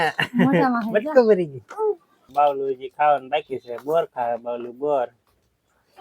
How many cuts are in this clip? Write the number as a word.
one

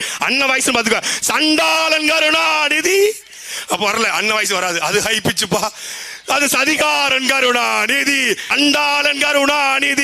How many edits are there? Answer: one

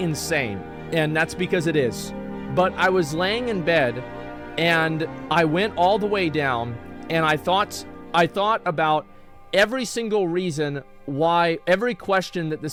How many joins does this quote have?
zero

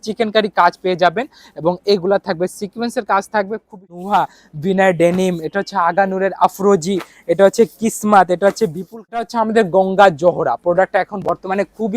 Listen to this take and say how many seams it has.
two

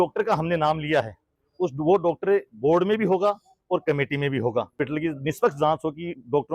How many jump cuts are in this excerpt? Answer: one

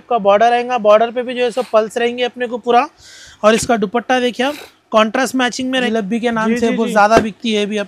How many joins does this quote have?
one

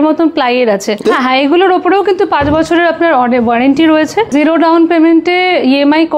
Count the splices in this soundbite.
two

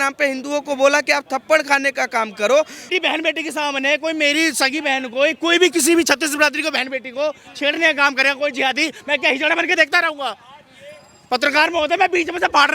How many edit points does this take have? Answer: one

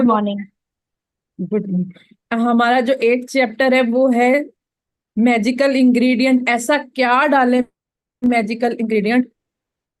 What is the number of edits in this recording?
two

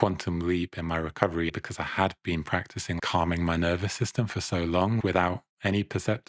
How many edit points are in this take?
three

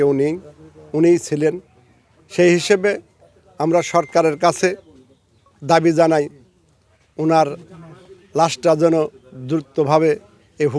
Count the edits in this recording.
zero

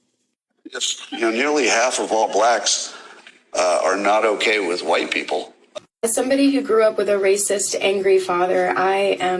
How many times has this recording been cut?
one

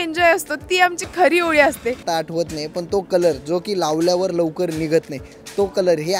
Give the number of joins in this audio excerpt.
one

